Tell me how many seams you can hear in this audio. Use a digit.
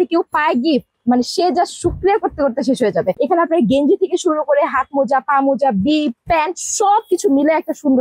0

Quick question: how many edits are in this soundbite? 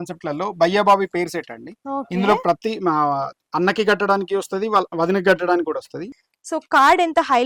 1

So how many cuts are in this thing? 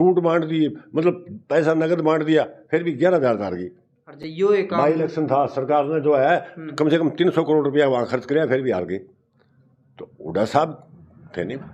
0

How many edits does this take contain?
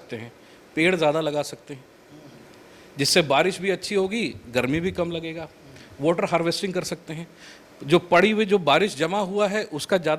0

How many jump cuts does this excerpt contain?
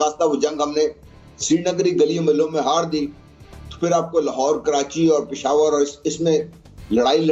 0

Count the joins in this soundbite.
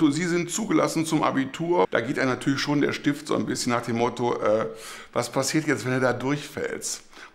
1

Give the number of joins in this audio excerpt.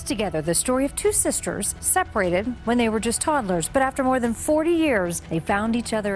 2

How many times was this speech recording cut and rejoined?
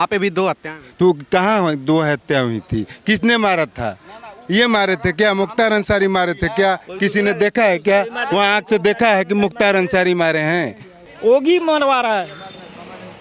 1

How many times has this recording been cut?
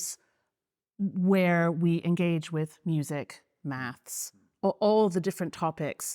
0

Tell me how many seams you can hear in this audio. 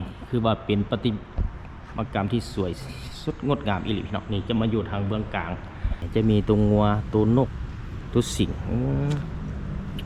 1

